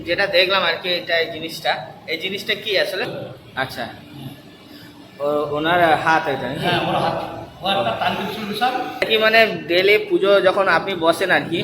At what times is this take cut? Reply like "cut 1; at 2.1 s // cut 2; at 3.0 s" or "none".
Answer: cut 1; at 3.1 s // cut 2; at 9.0 s